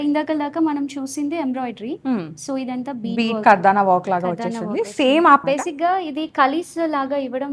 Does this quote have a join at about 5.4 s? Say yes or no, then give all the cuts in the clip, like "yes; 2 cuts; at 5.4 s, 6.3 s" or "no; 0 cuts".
yes; 1 cut; at 5.4 s